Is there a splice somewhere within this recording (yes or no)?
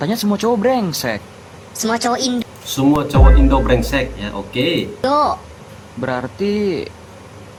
no